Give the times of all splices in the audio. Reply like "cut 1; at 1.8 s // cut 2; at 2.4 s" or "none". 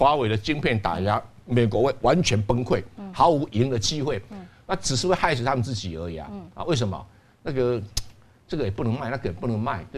none